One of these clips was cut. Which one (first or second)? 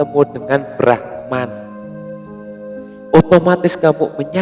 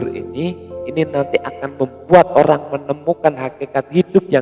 first